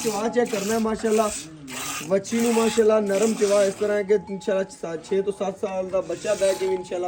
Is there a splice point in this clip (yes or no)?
no